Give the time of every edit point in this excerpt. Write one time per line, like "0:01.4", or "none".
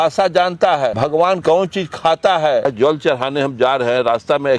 0:01.3
0:02.6